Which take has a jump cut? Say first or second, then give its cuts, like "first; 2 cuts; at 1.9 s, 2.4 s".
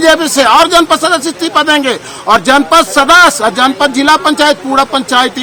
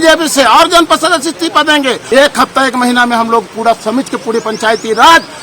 second; 1 cut; at 2.0 s